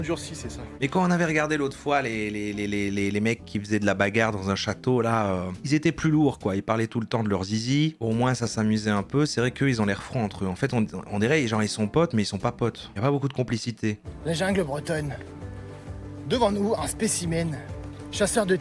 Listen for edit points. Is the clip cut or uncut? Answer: cut